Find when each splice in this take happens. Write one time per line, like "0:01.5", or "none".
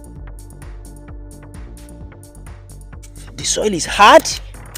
0:02.3
0:03.3